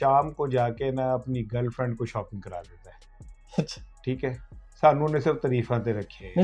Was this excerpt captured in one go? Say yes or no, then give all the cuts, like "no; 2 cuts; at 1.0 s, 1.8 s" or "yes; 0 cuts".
yes; 0 cuts